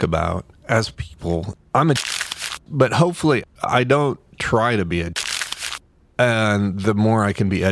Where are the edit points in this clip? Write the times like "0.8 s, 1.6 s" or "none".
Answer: 1.5 s